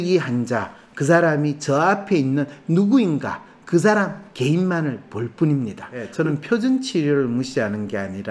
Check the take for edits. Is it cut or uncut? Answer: cut